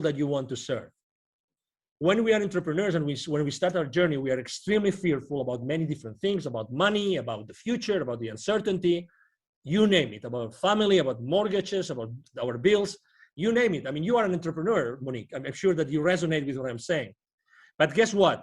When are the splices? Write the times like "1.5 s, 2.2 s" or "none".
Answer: none